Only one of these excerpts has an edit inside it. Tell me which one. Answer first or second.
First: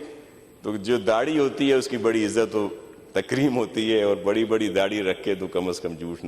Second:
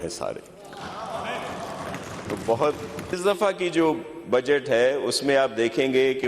second